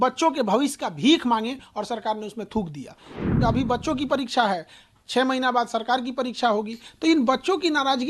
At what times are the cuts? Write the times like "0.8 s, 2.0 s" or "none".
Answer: 3.2 s